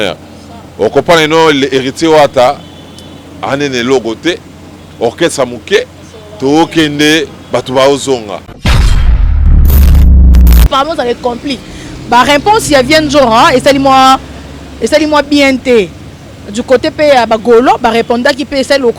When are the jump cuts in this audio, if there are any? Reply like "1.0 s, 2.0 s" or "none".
10.7 s